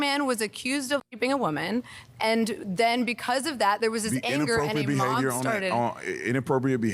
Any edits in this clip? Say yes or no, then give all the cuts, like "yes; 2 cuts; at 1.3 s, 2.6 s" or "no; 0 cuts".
yes; 1 cut; at 1.0 s